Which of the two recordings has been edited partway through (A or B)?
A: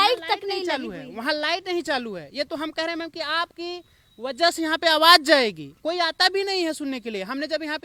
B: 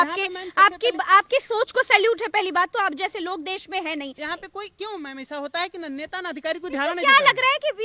B